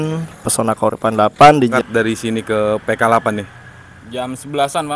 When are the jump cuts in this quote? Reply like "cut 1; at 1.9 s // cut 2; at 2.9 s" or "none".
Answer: cut 1; at 1.7 s